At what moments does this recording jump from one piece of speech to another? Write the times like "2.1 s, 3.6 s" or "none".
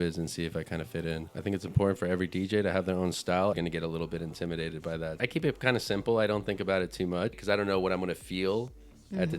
1.3 s, 3.5 s, 5.2 s, 7.4 s